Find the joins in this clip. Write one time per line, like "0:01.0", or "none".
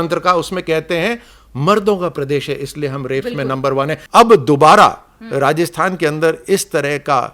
0:04.0